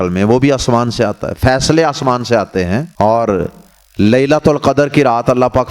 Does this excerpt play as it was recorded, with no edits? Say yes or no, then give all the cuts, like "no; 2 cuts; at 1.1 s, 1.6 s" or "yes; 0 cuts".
no; 1 cut; at 2.9 s